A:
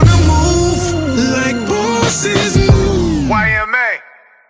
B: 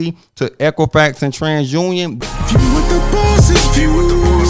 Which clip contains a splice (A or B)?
B